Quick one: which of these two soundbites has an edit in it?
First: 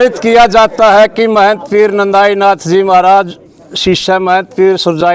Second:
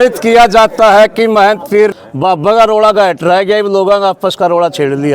second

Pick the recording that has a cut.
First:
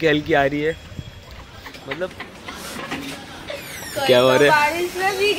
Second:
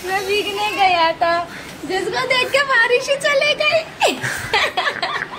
first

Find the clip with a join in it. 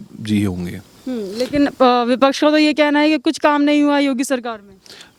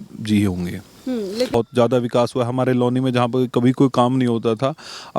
second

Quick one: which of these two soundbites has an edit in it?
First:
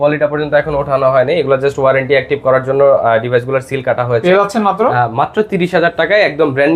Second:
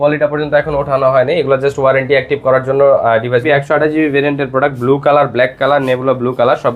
second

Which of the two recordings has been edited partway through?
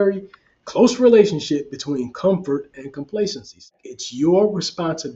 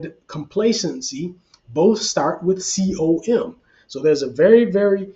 first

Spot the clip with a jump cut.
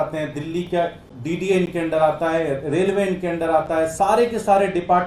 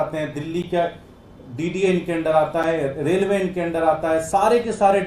first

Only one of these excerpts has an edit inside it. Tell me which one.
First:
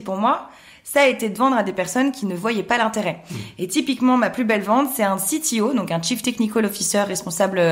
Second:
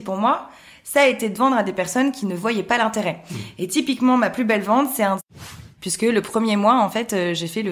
second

